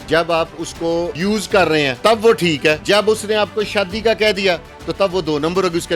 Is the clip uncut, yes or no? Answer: no